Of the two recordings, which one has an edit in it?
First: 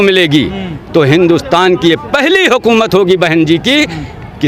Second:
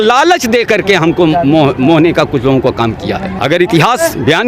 second; 1 cut; at 3.3 s

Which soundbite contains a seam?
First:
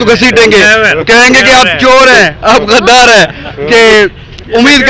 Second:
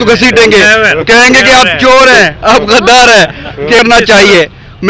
second; 1 cut; at 3.8 s

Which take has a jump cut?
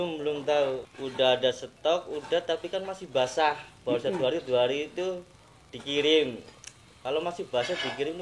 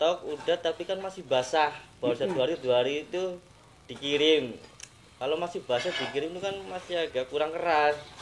first; 1 cut; at 0.9 s

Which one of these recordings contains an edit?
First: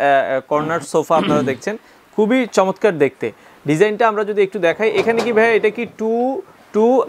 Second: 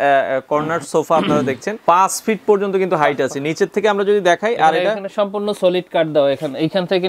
second; 1 cut; at 1.7 s

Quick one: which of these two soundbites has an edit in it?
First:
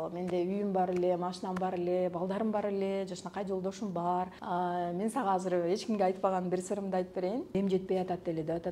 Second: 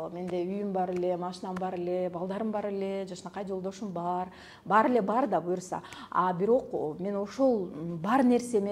first; 2 cuts; at 4.4 s, 7.5 s

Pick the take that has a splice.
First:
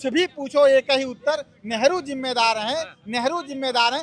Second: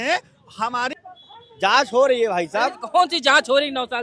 second; 1 cut; at 1.0 s

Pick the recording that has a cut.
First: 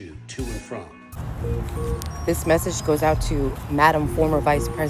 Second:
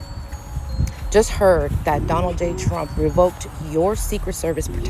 first; 1 cut; at 1.0 s

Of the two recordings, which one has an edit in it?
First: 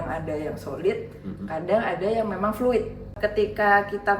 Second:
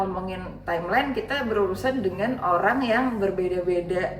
first; 1 cut; at 3.1 s

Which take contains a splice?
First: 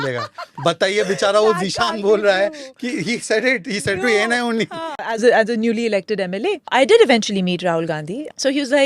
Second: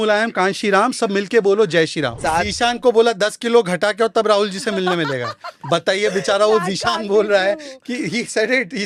first; 1 cut; at 5.1 s

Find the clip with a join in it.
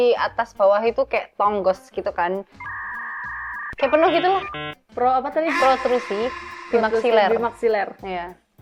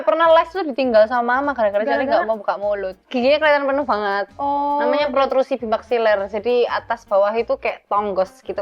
second; 1 cut; at 3.1 s

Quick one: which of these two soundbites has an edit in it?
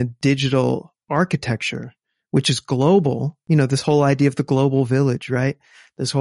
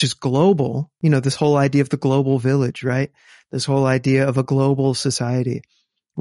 first; 1 cut; at 0.9 s

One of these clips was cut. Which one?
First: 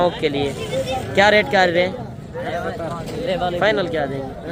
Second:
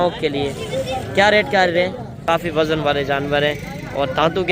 second; 1 cut; at 2.1 s

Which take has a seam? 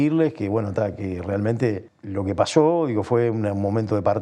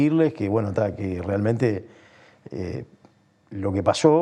first; 1 cut; at 1.9 s

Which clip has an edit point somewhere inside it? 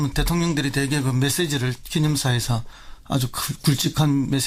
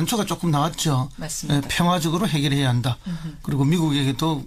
first; 1 cut; at 1.0 s

